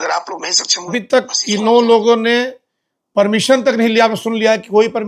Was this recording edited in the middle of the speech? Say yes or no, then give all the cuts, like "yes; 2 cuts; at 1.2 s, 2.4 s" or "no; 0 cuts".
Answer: yes; 1 cut; at 1.0 s